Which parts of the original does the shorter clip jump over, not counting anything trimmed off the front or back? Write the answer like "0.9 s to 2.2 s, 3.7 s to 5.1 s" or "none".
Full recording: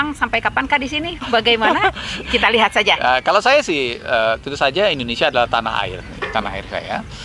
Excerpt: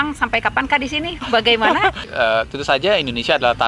2.1 s to 4.0 s